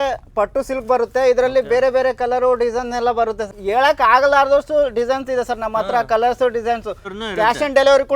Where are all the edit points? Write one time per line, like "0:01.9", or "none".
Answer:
0:03.5
0:07.1